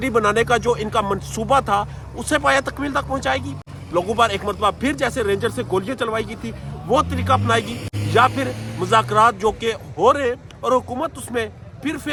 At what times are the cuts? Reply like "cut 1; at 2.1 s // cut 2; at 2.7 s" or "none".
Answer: none